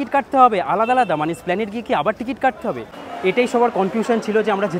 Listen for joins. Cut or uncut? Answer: cut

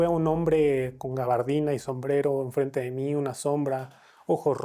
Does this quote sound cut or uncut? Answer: uncut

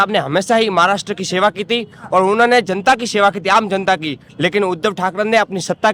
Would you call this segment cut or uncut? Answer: uncut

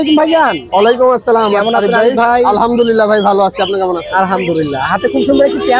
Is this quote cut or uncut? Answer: uncut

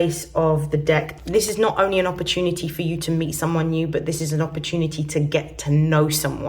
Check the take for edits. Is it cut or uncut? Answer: cut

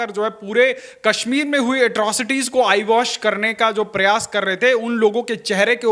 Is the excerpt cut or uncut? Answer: uncut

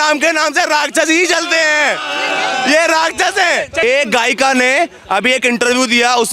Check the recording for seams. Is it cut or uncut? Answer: cut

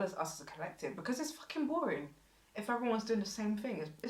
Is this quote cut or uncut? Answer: uncut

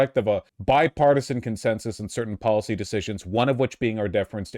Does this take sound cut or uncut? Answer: uncut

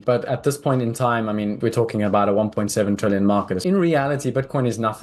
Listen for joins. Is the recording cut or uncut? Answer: cut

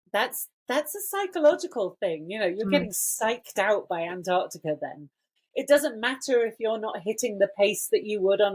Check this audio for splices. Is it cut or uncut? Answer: cut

